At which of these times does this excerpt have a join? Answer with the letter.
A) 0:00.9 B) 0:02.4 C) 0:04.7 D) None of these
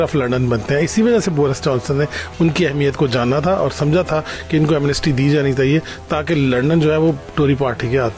D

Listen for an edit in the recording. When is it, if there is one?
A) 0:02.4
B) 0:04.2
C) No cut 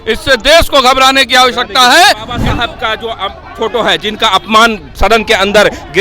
A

